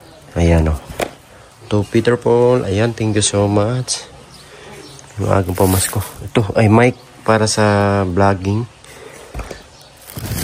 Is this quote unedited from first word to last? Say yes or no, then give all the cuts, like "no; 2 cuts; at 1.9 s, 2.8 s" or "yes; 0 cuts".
yes; 0 cuts